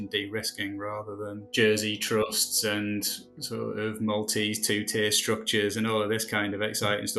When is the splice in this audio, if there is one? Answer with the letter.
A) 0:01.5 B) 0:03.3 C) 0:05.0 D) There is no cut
A